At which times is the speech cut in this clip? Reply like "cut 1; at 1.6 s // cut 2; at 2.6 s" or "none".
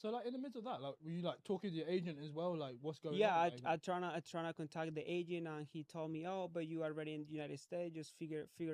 none